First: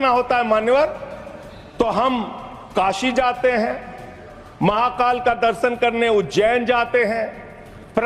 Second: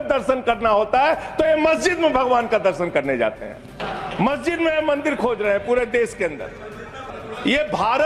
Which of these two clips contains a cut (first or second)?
second